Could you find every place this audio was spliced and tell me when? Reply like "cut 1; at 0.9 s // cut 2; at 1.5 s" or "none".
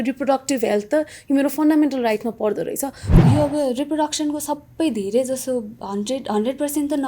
cut 1; at 3.0 s

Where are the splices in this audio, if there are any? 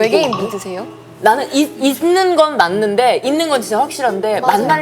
cut 1; at 1.1 s

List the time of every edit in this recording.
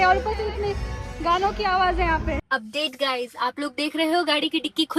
cut 1; at 2.4 s

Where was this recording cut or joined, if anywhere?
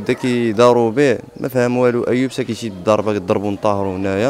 none

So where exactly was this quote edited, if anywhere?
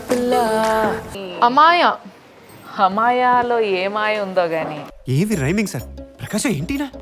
cut 1; at 1.1 s

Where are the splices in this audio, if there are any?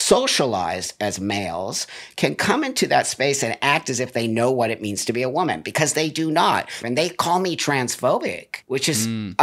cut 1; at 6.8 s // cut 2; at 8.5 s

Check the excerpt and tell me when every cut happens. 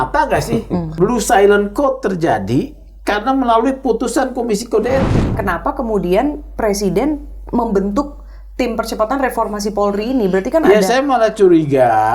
cut 1; at 0.9 s // cut 2; at 5.4 s

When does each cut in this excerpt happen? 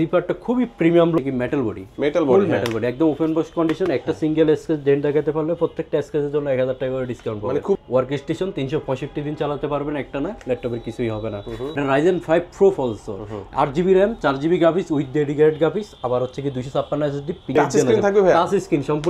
cut 1; at 1.2 s // cut 2; at 7.8 s // cut 3; at 11.7 s // cut 4; at 17.5 s

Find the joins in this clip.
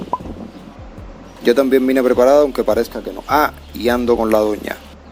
none

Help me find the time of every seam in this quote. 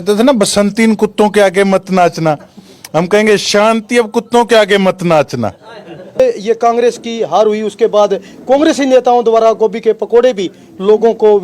cut 1; at 6.2 s

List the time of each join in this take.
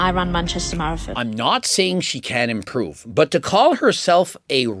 cut 1; at 1.1 s

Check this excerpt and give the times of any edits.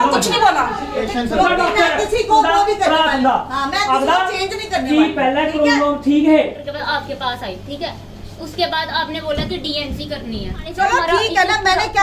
cut 1; at 1.0 s // cut 2; at 6.6 s // cut 3; at 10.7 s

